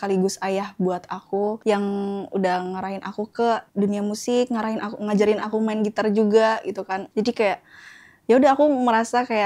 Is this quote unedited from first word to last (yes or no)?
yes